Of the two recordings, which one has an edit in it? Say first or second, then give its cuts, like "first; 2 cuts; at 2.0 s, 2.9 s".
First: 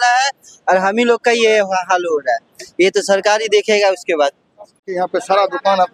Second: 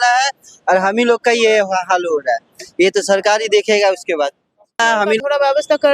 second; 1 cut; at 5.0 s